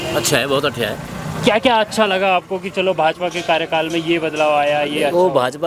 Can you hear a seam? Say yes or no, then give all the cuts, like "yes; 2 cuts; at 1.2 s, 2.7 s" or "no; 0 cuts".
no; 0 cuts